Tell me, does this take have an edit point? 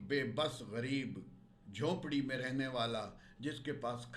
no; 0 cuts

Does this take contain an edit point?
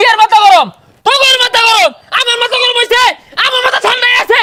no; 0 cuts

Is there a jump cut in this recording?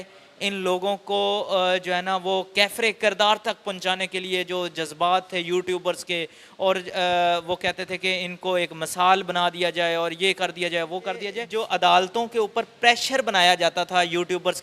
yes; 1 cut; at 11.4 s

